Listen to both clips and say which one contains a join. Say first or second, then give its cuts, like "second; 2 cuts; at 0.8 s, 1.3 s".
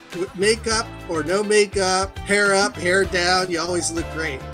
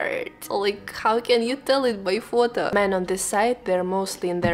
second; 1 cut; at 2.7 s